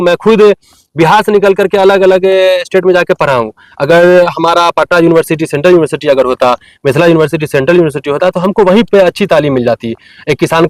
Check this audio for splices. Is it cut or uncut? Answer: uncut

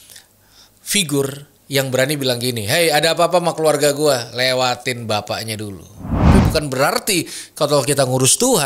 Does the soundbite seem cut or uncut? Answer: cut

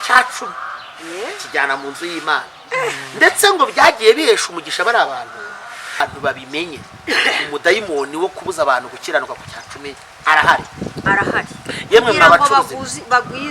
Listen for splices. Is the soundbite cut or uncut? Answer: cut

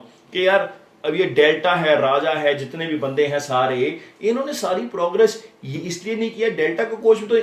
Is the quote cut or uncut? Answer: uncut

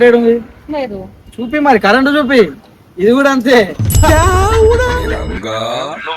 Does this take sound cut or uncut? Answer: uncut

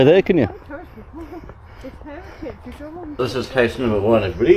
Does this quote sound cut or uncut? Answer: cut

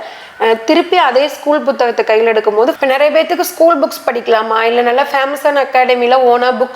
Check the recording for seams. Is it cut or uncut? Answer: cut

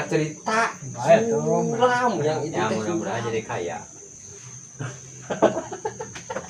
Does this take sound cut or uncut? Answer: uncut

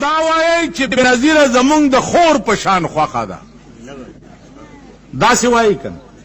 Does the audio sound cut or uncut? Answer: cut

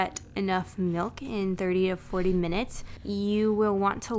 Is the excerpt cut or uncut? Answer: cut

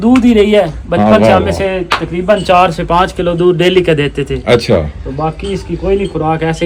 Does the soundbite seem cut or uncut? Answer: uncut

